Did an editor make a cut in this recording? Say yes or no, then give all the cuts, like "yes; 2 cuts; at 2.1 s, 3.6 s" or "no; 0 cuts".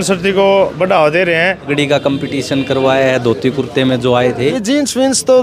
yes; 2 cuts; at 1.7 s, 4.6 s